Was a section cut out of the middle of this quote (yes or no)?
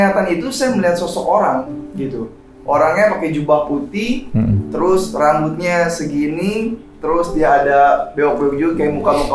no